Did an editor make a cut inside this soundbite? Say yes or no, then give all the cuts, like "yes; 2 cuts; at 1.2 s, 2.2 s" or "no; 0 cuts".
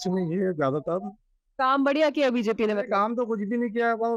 no; 0 cuts